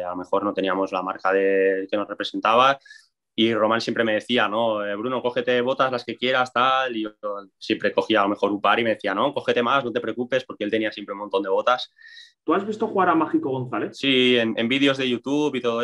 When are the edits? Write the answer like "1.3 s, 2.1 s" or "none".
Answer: 12.2 s, 14.0 s